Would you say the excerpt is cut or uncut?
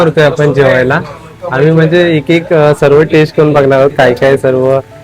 uncut